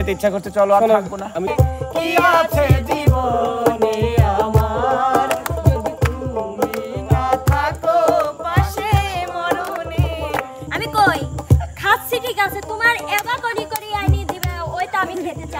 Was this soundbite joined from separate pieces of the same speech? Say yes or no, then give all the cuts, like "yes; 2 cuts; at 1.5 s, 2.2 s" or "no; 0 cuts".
yes; 2 cuts; at 1.5 s, 10.7 s